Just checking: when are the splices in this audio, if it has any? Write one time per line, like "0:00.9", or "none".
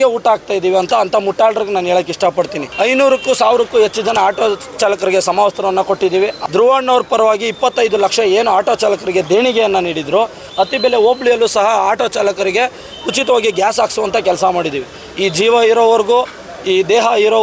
0:02.6
0:06.4
0:10.4